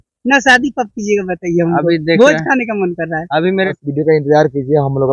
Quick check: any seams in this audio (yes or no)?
yes